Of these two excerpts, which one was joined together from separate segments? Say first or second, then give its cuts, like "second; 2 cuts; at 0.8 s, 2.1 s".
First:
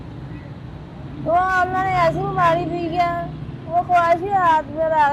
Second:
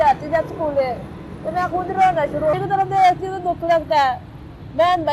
second; 1 cut; at 2.5 s